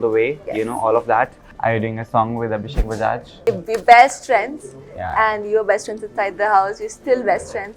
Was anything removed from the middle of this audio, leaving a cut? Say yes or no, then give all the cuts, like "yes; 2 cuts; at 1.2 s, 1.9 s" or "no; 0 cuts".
yes; 2 cuts; at 1.4 s, 3.3 s